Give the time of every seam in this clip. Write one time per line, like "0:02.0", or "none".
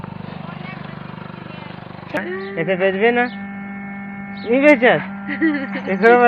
0:02.2